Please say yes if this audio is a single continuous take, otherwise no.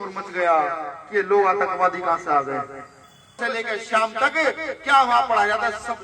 no